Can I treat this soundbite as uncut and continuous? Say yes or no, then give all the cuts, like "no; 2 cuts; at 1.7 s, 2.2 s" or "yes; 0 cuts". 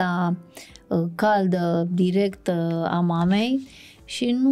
yes; 0 cuts